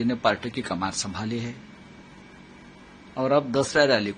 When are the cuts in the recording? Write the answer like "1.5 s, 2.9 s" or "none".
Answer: none